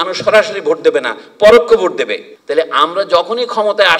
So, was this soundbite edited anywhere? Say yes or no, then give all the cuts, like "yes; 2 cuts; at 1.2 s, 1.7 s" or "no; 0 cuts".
yes; 1 cut; at 2.3 s